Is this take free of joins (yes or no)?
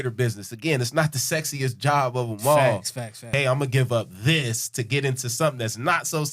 no